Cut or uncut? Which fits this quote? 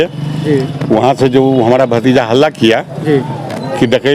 uncut